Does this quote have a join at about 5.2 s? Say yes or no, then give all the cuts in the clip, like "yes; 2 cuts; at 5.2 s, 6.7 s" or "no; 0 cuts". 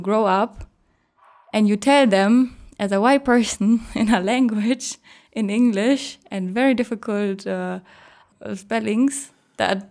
no; 1 cut; at 8.2 s